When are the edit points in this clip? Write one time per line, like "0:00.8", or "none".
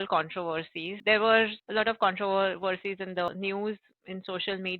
0:01.0
0:01.6
0:03.3

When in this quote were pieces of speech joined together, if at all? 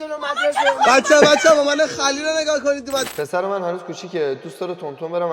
0:03.1

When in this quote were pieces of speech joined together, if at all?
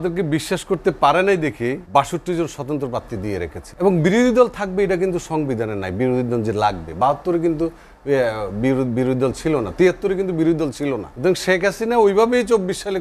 0:01.8
0:03.6
0:11.1

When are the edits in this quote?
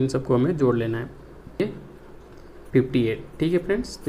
0:01.6

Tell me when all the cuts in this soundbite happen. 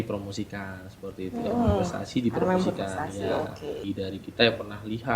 0:03.8

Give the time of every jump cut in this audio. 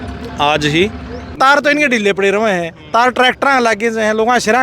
0:01.4

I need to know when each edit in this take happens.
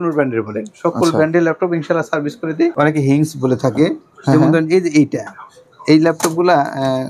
0:02.7

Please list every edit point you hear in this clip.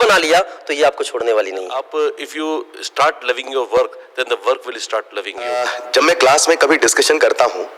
0:01.8
0:05.7

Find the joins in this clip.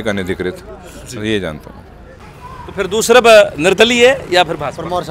0:02.2

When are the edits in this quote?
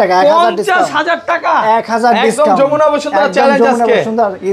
none

